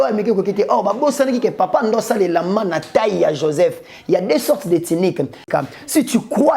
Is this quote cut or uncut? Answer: cut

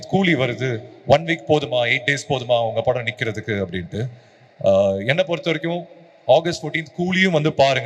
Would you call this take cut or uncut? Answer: uncut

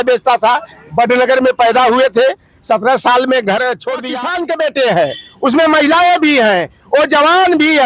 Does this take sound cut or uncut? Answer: cut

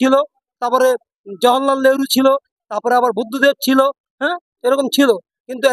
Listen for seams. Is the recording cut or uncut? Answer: uncut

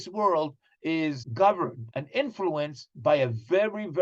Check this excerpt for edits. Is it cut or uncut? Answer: cut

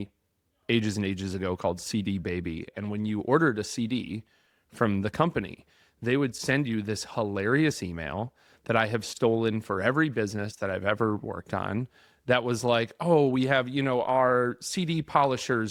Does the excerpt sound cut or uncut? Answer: uncut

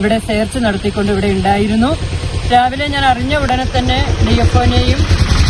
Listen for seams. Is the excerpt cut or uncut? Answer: uncut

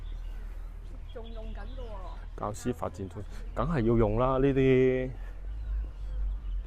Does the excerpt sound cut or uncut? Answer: uncut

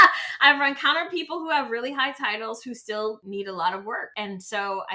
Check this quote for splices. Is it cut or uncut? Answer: cut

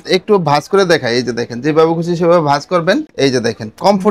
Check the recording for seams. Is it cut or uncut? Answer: uncut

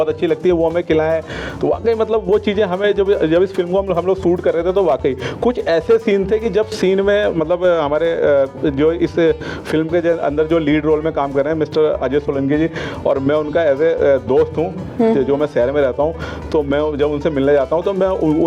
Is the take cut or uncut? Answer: uncut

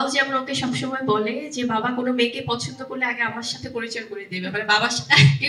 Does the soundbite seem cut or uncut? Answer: uncut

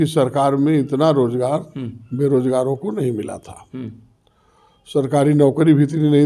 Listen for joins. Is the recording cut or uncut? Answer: uncut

